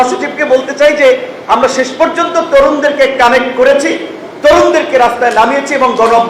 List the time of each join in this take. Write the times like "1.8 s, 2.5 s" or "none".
none